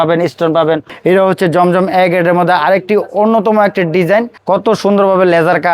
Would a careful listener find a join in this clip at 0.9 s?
yes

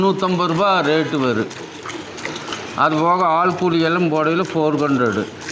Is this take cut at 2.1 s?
no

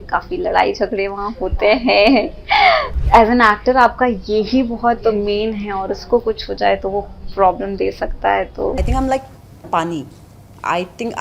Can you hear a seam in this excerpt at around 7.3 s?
no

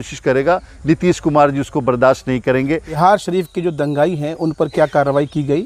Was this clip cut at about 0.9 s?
no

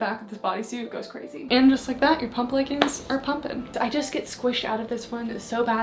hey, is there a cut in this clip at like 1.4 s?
yes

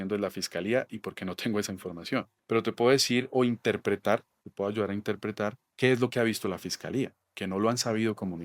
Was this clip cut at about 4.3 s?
no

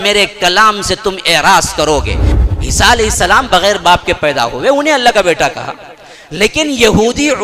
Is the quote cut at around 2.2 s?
yes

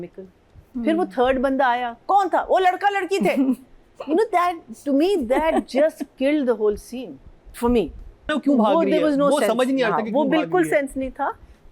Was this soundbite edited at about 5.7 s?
no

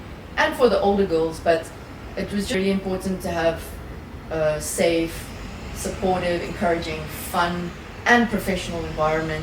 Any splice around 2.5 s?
yes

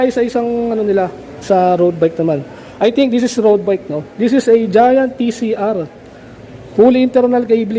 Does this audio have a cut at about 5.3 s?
no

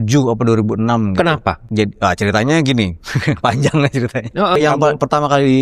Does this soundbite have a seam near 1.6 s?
yes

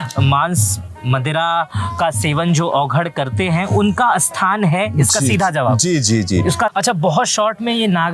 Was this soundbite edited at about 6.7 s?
yes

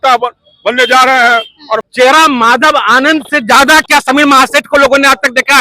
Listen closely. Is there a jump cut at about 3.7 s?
no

